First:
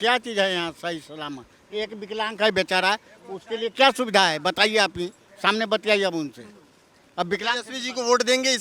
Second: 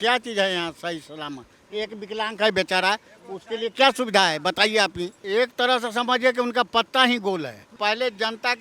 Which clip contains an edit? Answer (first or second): second